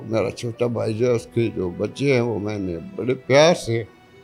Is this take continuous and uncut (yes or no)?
yes